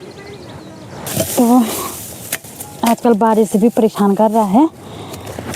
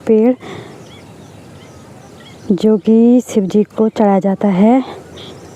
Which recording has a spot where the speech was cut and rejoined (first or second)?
first